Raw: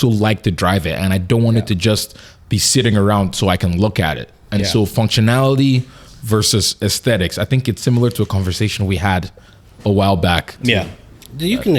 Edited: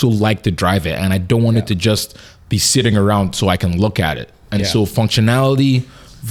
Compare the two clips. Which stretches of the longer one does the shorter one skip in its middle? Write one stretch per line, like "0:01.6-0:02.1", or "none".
none